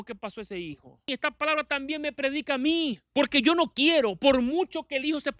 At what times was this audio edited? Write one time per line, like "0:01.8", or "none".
0:01.1
0:03.0

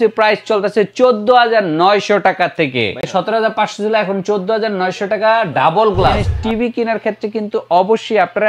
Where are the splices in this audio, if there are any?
0:03.1
0:06.3

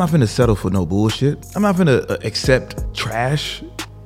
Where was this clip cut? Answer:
0:01.4
0:02.8

